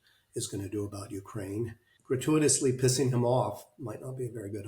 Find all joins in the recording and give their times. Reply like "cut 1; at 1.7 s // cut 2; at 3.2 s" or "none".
cut 1; at 1.9 s